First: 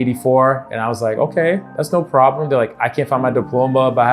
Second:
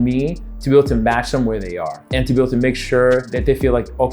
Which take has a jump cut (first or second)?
second